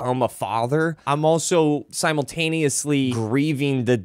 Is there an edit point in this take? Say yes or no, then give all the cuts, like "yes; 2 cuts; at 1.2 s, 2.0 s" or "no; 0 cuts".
yes; 3 cuts; at 1.0 s, 1.9 s, 3.2 s